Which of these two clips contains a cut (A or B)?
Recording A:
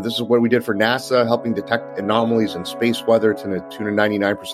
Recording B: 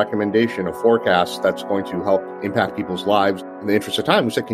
B